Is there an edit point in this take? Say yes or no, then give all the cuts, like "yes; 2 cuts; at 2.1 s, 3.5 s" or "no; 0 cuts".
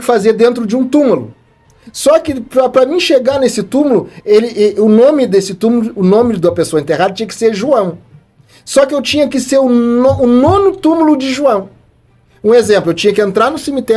no; 0 cuts